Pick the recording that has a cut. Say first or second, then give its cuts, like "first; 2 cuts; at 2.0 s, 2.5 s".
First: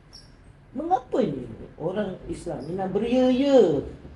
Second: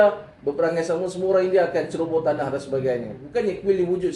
second; 1 cut; at 3.2 s